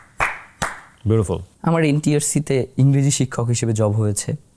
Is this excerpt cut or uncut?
cut